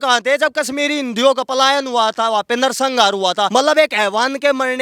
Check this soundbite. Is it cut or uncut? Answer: cut